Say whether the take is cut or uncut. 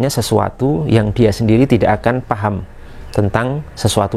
uncut